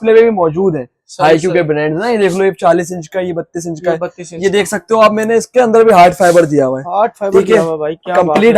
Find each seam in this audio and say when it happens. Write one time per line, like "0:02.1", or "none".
none